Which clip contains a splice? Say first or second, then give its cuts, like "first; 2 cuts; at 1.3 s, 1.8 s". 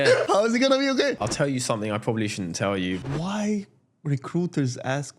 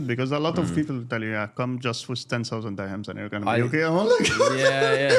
first; 2 cuts; at 1.1 s, 3.0 s